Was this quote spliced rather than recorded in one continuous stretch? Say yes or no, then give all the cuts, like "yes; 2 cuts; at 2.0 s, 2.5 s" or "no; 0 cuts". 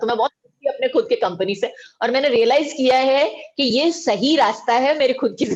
no; 0 cuts